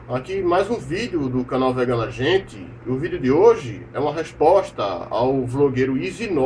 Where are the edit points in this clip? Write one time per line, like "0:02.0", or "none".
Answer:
none